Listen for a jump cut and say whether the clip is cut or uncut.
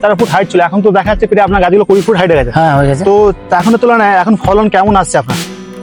uncut